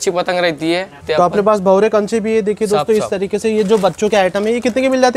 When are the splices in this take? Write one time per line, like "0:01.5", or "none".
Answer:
0:01.0

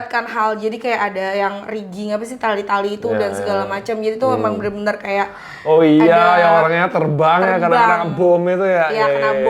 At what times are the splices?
none

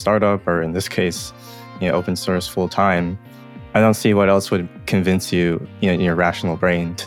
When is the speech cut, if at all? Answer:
0:03.5

